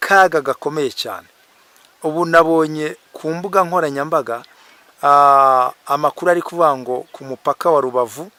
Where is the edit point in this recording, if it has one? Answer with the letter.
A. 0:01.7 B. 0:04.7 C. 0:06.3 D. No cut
D